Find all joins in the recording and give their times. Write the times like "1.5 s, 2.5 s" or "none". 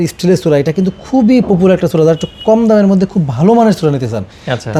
none